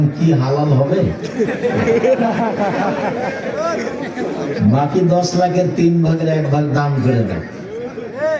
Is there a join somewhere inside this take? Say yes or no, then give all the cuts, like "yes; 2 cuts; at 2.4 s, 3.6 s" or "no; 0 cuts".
no; 0 cuts